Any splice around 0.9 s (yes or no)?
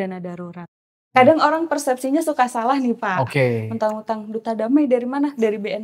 yes